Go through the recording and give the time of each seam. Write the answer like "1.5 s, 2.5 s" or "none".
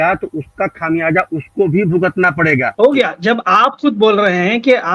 2.7 s